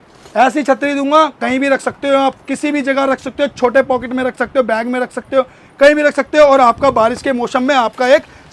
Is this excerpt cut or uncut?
uncut